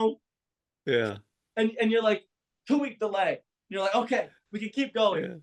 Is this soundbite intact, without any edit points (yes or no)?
yes